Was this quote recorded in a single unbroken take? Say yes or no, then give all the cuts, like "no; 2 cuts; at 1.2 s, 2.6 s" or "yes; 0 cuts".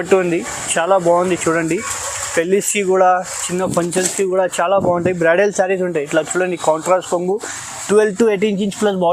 yes; 0 cuts